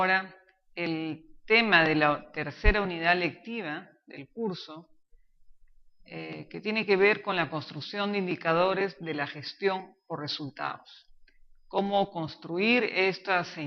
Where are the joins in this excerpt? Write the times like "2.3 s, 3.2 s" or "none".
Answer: 12.2 s